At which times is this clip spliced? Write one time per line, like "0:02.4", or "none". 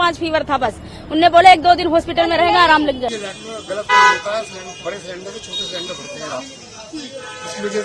0:03.1